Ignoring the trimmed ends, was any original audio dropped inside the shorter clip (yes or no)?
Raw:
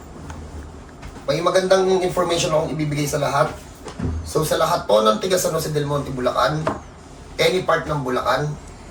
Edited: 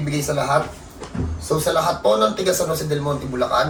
no